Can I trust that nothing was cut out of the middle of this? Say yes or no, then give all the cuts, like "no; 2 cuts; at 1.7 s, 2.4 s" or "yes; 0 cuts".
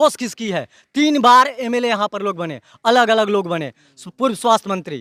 yes; 0 cuts